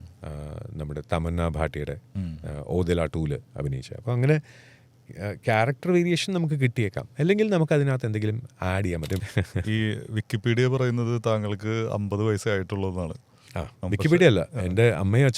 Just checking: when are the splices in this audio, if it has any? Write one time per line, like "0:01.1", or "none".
0:09.2